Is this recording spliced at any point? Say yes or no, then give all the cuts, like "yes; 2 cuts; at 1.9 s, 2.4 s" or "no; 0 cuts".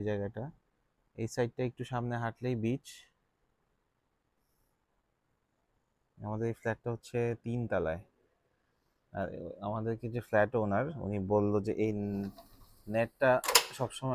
no; 0 cuts